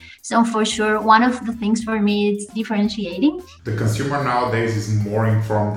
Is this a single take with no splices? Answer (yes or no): no